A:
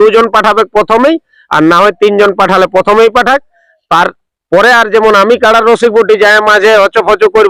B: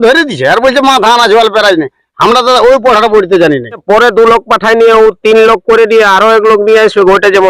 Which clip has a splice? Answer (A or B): B